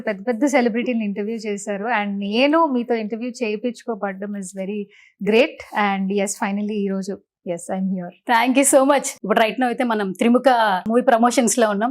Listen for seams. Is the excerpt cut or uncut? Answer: cut